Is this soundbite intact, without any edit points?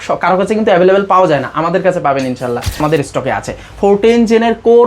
no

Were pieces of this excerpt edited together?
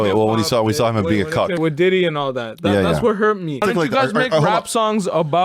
yes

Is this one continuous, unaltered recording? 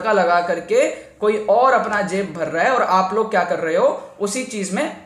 yes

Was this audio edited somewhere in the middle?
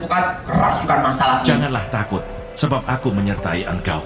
yes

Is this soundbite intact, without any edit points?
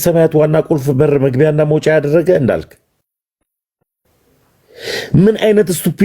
yes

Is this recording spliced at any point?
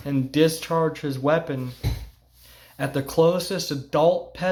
no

